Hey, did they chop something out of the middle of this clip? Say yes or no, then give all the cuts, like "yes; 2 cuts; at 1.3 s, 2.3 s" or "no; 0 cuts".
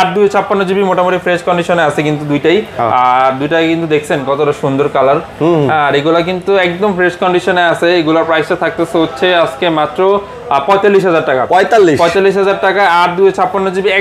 no; 0 cuts